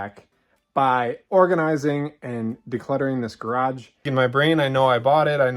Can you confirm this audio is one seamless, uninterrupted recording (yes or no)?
no